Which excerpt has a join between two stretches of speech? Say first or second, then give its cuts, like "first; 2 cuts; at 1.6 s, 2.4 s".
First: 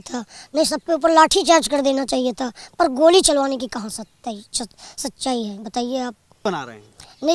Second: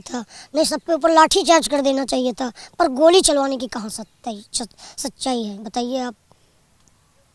first; 1 cut; at 6.4 s